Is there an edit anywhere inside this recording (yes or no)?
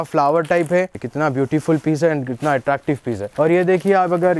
yes